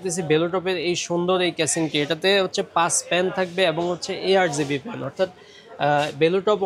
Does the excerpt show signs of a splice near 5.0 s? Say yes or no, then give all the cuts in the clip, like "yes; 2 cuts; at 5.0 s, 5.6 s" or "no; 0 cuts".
no; 0 cuts